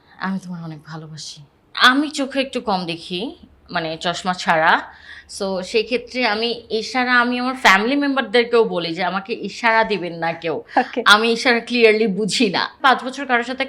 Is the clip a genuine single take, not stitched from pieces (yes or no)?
no